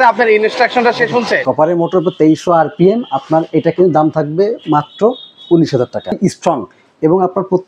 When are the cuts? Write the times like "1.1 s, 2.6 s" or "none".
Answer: 1.4 s, 6.2 s